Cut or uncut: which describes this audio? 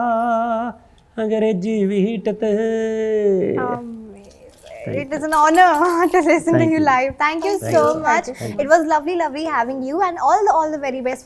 uncut